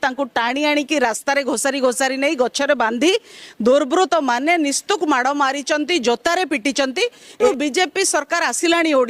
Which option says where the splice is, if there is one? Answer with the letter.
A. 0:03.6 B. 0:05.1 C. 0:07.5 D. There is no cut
C